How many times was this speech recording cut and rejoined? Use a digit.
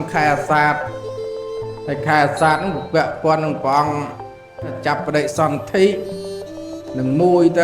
1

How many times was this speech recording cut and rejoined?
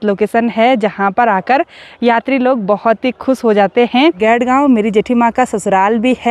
1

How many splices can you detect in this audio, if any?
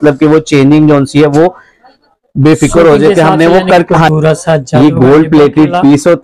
1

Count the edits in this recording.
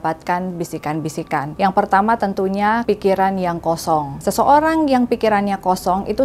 3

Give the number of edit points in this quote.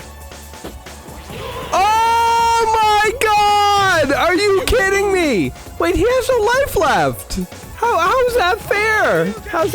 1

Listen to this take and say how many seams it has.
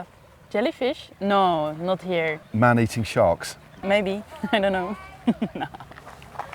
2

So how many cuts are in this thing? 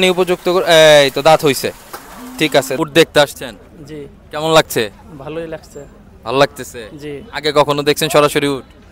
1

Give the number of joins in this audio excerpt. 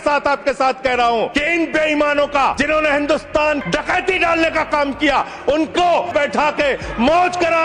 4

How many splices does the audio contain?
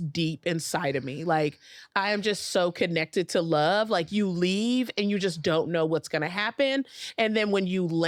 0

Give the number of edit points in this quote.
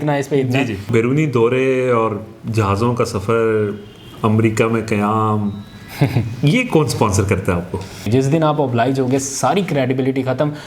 2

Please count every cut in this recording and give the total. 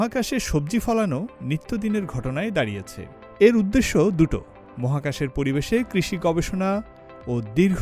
0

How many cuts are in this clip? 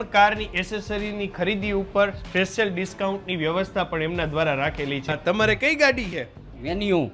1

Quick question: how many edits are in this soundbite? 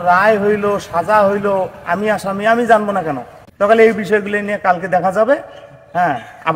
0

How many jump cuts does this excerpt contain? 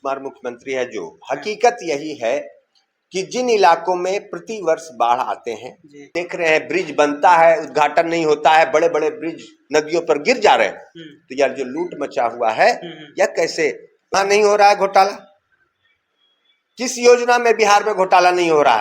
2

